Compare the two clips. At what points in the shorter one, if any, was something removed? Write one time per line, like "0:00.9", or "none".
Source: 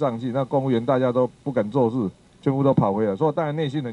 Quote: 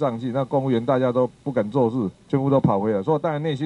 0:02.2